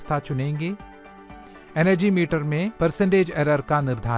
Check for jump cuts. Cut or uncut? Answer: cut